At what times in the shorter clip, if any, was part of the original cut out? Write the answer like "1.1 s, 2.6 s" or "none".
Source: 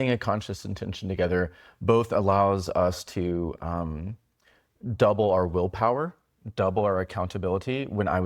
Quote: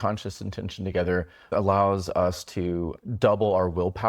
1.5 s, 3.0 s